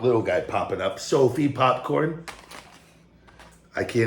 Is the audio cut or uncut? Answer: cut